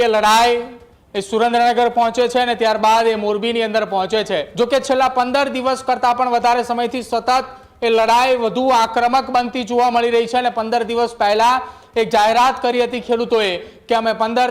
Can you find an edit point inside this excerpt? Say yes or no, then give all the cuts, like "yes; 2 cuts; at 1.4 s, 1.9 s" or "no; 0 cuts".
yes; 1 cut; at 4.5 s